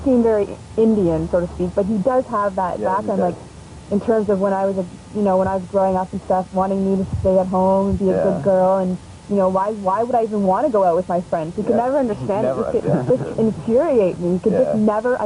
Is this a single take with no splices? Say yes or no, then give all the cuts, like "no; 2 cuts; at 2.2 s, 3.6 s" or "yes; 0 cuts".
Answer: no; 1 cut; at 10.5 s